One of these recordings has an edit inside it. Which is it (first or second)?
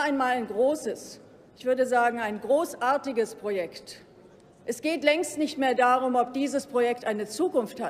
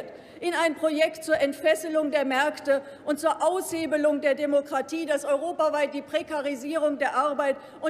first